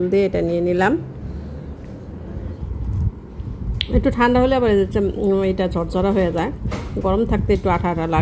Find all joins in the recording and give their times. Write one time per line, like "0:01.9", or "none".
0:02.6